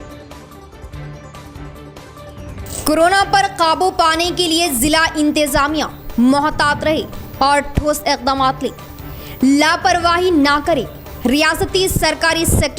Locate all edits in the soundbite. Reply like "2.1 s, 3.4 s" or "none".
0.9 s, 1.6 s